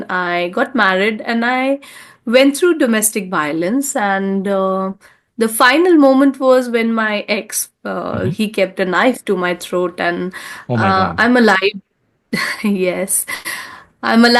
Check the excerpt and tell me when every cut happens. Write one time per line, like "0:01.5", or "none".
none